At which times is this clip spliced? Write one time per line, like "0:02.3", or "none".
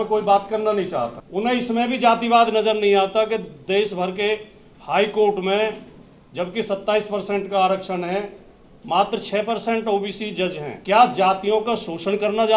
0:01.2
0:10.7